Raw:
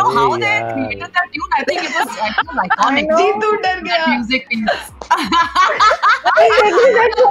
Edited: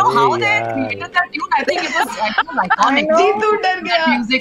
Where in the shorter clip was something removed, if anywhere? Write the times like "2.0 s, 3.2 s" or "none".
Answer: none

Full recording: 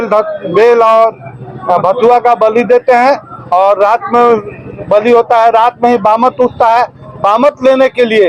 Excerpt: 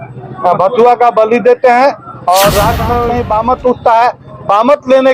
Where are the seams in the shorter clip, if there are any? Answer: 3.1 s

